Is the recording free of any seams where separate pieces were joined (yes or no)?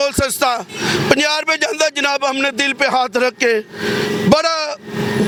yes